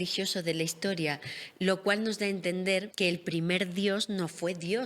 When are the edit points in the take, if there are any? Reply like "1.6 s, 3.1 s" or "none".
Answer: 2.9 s